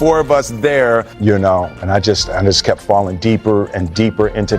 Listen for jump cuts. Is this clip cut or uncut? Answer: cut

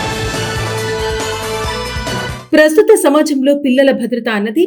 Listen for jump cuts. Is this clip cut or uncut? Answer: uncut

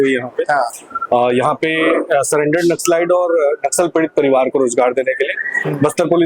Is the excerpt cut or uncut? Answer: uncut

